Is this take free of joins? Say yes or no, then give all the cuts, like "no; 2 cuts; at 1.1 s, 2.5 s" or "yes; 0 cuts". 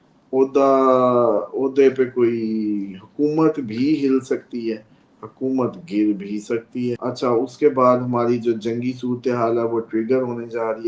no; 1 cut; at 7.0 s